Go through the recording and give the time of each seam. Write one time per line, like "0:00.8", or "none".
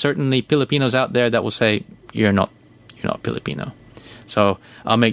none